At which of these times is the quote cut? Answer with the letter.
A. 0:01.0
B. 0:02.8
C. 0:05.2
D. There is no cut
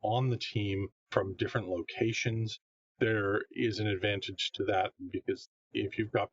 A